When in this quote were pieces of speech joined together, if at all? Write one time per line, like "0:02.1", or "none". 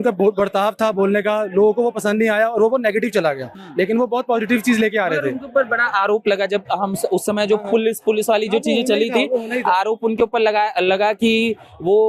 none